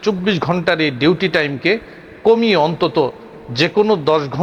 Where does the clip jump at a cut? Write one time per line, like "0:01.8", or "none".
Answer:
none

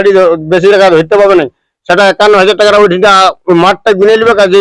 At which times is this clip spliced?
none

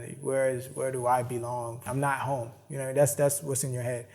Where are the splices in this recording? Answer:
0:01.9

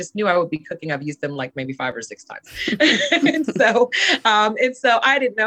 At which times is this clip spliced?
none

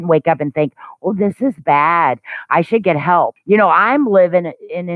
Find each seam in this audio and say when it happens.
0:03.4

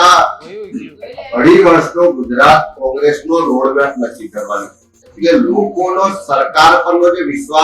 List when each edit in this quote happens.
0:05.1

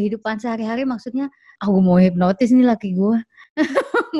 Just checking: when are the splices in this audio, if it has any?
0:01.5

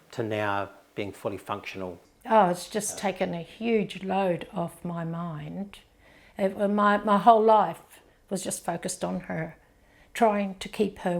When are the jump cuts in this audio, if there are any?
0:02.1

